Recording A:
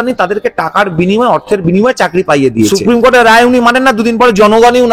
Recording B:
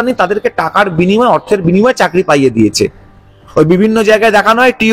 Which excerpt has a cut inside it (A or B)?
A